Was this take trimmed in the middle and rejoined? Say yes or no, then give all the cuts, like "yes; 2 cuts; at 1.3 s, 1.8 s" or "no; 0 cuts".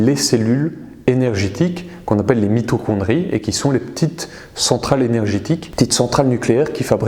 yes; 1 cut; at 5.7 s